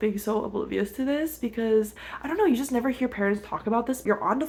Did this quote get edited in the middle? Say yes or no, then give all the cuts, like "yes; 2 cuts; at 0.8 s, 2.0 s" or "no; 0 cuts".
no; 0 cuts